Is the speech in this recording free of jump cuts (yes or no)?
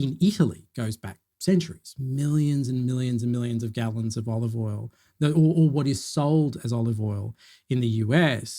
no